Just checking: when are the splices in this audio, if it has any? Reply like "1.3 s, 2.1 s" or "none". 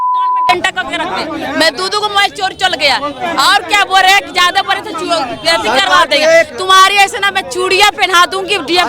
none